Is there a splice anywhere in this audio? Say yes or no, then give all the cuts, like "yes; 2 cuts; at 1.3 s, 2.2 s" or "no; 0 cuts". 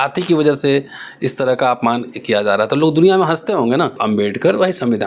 yes; 1 cut; at 4.0 s